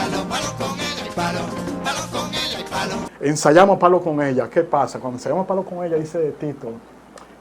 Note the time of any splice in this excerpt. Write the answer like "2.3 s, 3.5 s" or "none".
3.1 s